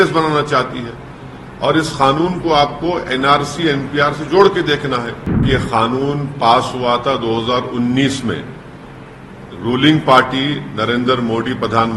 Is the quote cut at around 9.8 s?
no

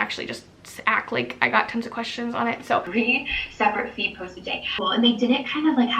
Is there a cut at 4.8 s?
yes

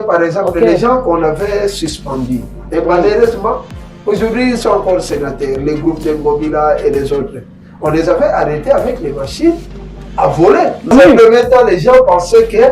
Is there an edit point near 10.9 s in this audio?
yes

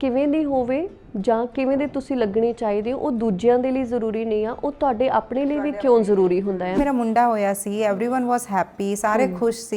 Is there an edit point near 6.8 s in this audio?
yes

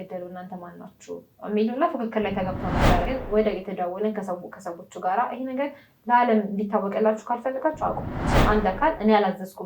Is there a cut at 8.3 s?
yes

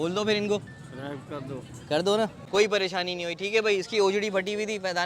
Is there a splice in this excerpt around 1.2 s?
no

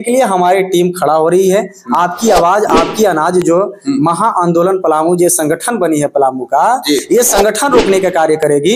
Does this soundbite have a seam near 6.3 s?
no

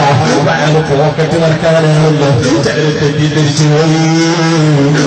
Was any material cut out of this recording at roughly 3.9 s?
yes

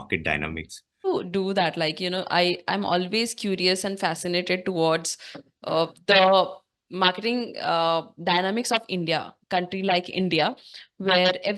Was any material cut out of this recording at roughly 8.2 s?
no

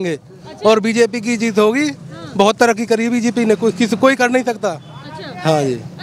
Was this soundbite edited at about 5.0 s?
no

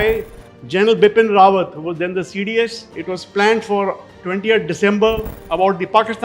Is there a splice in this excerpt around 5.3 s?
yes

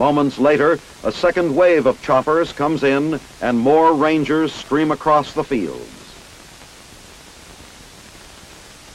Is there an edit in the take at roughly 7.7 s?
no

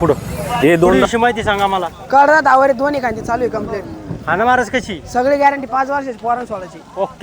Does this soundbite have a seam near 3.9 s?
no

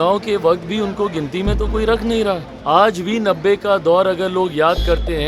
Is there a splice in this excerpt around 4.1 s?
no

